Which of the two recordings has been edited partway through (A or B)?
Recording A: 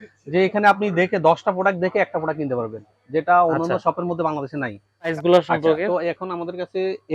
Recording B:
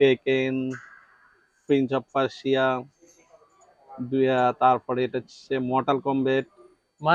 A